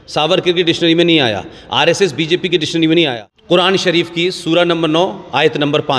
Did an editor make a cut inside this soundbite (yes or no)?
yes